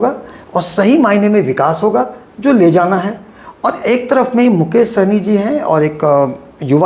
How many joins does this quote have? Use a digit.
0